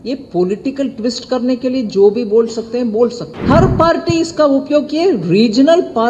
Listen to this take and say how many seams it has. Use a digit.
1